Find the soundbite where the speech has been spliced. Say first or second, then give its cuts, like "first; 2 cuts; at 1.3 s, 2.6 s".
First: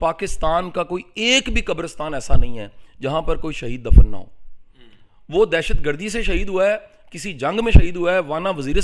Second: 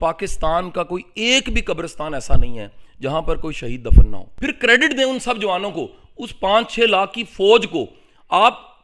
second; 1 cut; at 4.2 s